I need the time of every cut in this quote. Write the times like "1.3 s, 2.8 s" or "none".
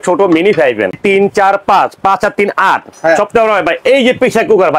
1.0 s